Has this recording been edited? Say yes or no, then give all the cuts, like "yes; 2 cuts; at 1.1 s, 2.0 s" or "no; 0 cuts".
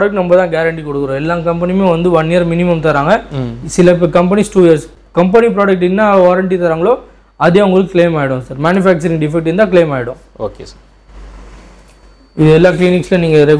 no; 0 cuts